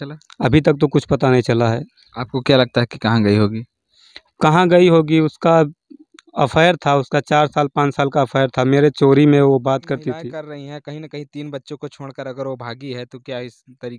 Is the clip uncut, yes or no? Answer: no